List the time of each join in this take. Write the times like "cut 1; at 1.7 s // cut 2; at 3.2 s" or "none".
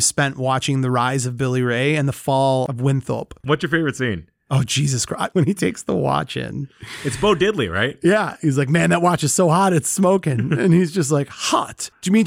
cut 1; at 3.3 s // cut 2; at 5.3 s // cut 3; at 8.3 s